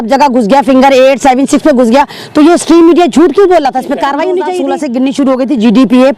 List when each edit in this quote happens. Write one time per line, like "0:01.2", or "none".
0:04.6